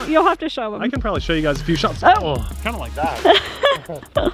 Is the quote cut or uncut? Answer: uncut